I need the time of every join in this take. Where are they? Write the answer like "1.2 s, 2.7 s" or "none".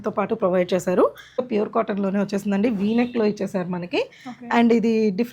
1.5 s